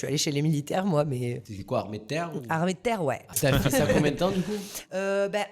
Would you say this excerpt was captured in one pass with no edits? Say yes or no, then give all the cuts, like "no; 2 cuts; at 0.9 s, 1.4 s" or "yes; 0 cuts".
no; 2 cuts; at 1.5 s, 3.3 s